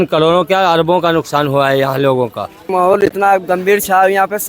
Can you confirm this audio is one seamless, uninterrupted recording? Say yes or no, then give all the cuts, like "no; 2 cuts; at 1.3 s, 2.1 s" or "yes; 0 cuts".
no; 1 cut; at 2.7 s